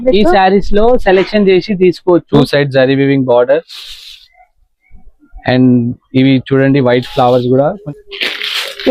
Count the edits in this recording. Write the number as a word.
two